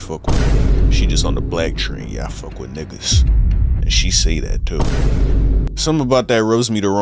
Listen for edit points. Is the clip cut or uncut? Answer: cut